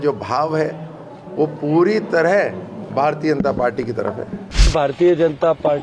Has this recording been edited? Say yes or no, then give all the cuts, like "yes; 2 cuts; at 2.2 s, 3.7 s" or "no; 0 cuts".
yes; 1 cut; at 4.7 s